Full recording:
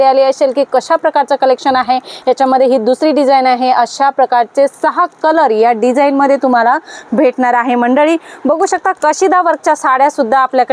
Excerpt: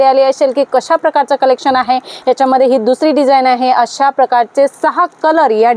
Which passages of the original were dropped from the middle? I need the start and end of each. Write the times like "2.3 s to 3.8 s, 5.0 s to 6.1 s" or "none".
none